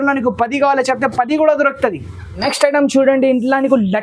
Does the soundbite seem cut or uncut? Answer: uncut